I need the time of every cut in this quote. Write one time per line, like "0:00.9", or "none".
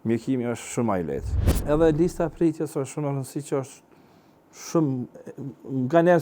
0:01.6